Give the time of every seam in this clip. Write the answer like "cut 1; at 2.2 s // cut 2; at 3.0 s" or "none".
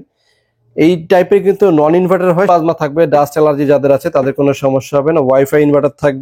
cut 1; at 2.5 s